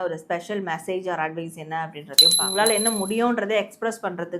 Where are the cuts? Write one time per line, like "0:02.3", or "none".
0:02.4